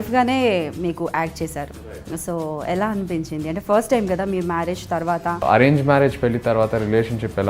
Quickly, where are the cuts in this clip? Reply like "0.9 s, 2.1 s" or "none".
5.4 s